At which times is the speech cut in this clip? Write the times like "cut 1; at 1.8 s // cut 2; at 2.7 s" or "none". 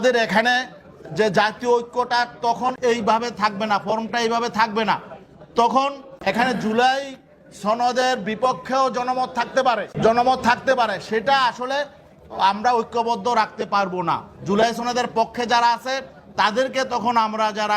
cut 1; at 2.8 s // cut 2; at 6.1 s // cut 3; at 9.9 s

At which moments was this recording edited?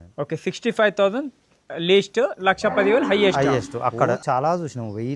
cut 1; at 4.2 s

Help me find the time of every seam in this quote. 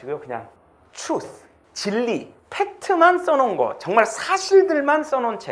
cut 1; at 2.4 s

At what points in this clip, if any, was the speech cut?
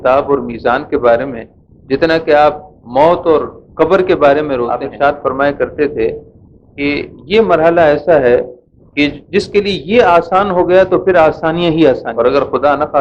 cut 1; at 4.9 s // cut 2; at 12.1 s

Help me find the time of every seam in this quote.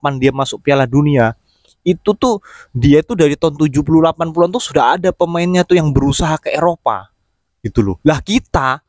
none

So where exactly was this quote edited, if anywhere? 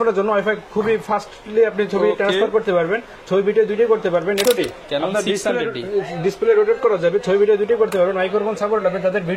cut 1; at 4.4 s

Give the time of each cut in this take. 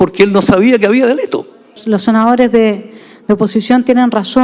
cut 1; at 1.7 s

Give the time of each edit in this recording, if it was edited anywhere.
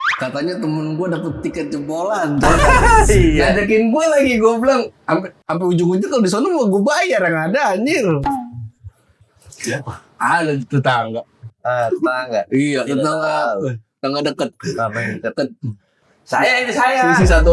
none

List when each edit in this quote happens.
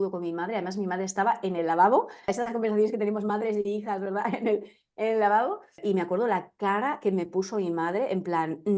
cut 1; at 2.3 s // cut 2; at 5.8 s

